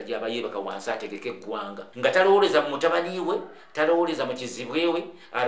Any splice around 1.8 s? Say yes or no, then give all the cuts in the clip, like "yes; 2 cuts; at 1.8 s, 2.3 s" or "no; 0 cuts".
yes; 1 cut; at 1.8 s